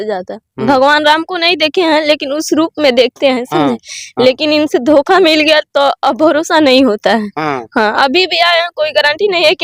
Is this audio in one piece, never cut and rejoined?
yes; 0 cuts

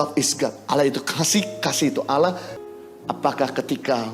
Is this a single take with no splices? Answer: no; 1 cut; at 2.7 s

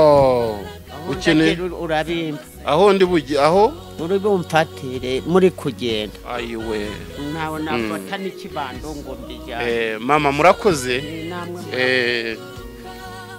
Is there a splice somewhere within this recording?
yes; 1 cut; at 12.4 s

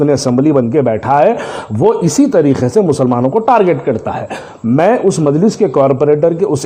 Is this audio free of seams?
yes; 0 cuts

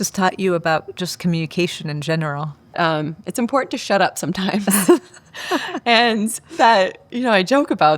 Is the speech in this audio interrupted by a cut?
yes; 1 cut; at 2.7 s

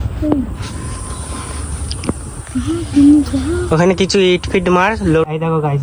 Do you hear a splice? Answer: no; 0 cuts

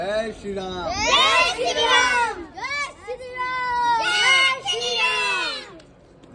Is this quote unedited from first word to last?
yes; 0 cuts

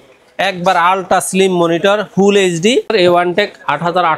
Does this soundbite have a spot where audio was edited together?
yes; 1 cut; at 2.9 s

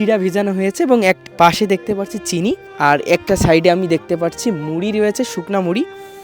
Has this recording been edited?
yes; 2 cuts; at 1.2 s, 2.7 s

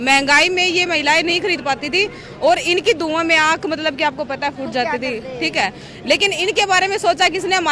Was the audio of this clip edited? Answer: no; 0 cuts

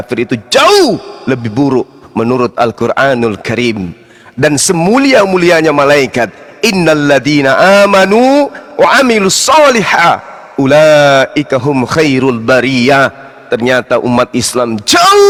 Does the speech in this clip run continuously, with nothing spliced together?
yes; 0 cuts

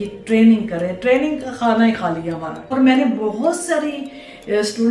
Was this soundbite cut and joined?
yes; 1 cut; at 2.6 s

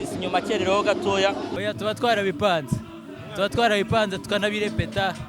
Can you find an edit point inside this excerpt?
yes; 1 cut; at 1.5 s

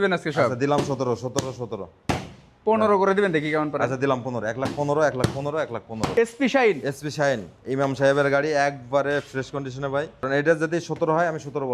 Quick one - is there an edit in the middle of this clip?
yes; 2 cuts; at 6.0 s, 10.3 s

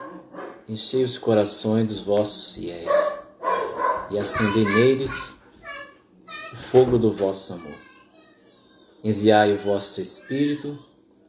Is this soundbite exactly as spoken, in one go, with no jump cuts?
yes; 0 cuts

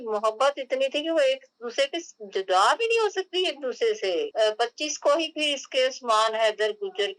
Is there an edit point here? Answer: yes; 1 cut; at 4.3 s

